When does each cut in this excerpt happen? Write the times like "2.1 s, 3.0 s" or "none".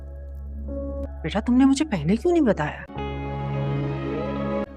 1.0 s